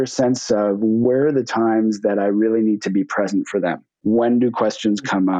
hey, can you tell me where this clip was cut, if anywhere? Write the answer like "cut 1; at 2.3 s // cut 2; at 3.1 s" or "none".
cut 1; at 1.0 s // cut 2; at 3.9 s